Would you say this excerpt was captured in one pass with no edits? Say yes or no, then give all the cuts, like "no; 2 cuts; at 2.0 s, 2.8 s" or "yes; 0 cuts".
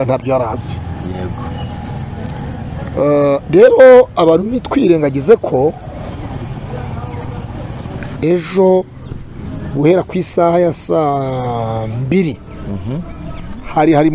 yes; 0 cuts